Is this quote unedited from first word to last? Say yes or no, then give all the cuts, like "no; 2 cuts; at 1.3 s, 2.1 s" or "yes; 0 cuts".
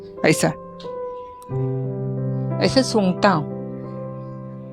yes; 0 cuts